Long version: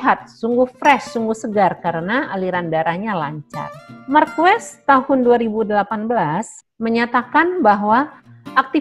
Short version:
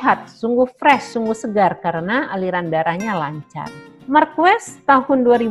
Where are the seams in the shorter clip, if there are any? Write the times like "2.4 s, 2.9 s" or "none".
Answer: none